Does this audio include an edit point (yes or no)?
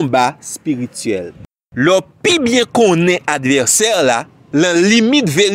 yes